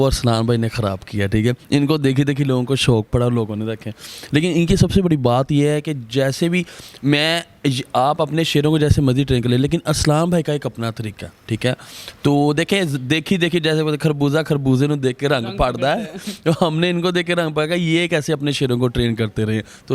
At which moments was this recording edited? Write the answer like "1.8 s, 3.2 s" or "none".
none